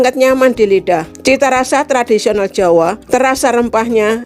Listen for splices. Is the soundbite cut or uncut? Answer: cut